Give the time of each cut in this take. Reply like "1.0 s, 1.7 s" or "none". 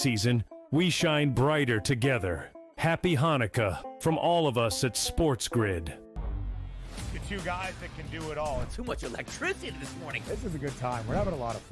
6.1 s